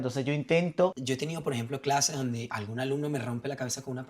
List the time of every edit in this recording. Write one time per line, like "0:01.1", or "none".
0:00.9